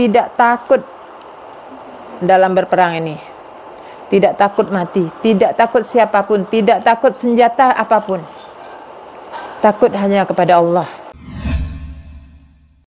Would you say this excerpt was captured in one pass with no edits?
no; 1 cut; at 11.1 s

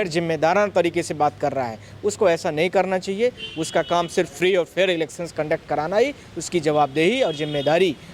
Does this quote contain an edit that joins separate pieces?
no; 0 cuts

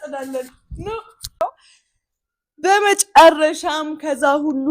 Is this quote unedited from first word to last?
no; 1 cut; at 1.4 s

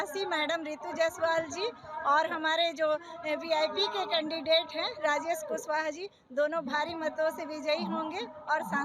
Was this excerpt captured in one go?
yes; 0 cuts

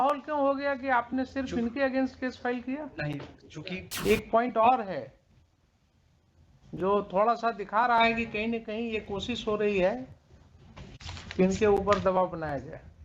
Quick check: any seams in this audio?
yes; 1 cut; at 3.9 s

